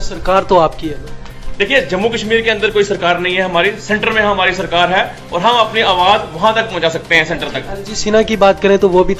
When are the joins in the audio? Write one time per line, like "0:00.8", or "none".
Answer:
none